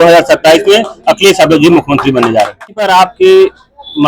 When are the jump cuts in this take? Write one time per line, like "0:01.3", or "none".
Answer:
0:02.8